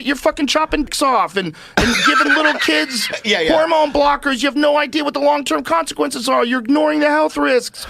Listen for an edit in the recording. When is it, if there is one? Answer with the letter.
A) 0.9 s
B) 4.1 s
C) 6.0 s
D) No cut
A